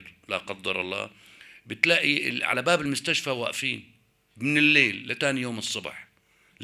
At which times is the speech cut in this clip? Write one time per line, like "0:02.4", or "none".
none